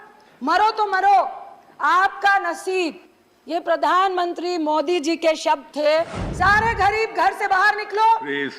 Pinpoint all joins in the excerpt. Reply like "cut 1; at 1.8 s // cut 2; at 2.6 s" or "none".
cut 1; at 6.2 s